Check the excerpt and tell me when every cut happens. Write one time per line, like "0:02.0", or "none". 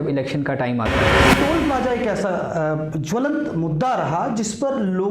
0:01.2